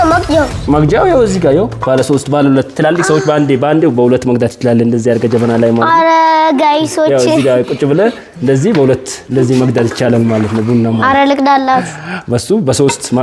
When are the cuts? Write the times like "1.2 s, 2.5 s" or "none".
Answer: none